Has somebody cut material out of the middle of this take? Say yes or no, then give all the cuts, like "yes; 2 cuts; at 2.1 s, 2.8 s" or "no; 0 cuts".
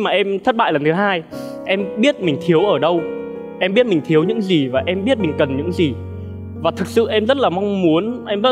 no; 0 cuts